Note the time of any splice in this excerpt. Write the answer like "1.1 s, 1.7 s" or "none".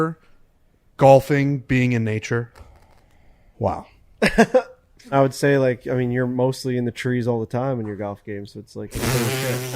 5.1 s